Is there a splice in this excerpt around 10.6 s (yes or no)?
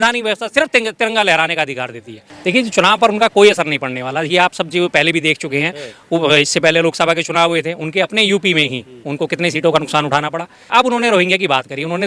yes